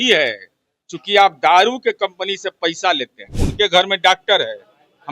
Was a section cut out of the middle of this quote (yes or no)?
yes